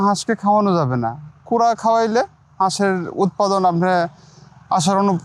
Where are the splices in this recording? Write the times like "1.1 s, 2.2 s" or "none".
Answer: none